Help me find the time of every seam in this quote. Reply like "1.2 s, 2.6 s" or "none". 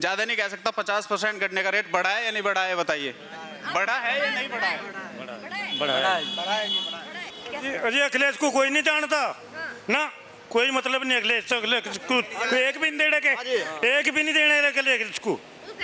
7.4 s

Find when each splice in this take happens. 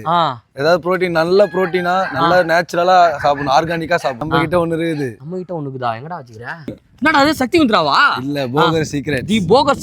4.2 s, 6.9 s

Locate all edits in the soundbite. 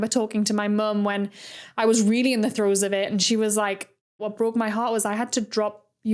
4.2 s

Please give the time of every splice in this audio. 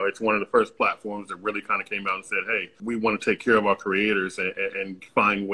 2.7 s

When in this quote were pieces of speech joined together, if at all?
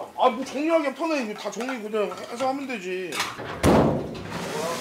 3.4 s

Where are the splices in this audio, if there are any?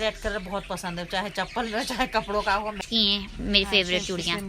2.8 s

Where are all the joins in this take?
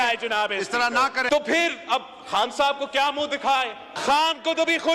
1.3 s, 3.9 s

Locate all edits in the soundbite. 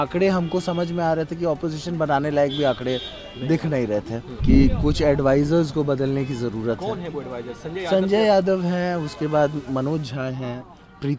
4.2 s

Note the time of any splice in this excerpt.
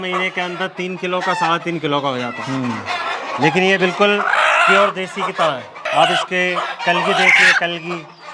none

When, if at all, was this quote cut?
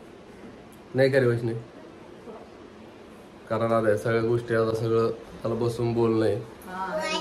none

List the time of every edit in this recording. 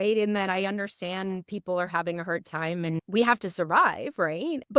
3.0 s

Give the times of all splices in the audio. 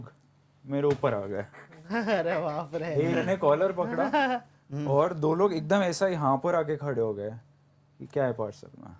none

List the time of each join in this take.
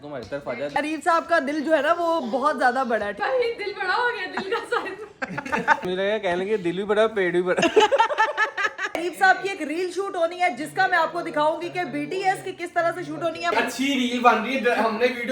0.7 s, 3.2 s, 5.8 s, 9.0 s, 13.5 s

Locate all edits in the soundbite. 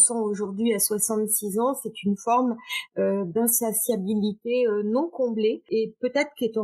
5.7 s

